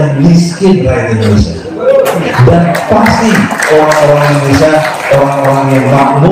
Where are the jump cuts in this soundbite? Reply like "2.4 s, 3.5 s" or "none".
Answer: 2.2 s